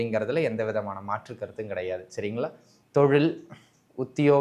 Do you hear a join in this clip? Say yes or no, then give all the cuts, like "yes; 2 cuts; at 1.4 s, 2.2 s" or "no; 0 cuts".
yes; 1 cut; at 2.7 s